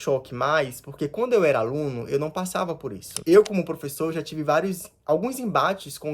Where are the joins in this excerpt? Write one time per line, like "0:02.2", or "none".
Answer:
0:03.1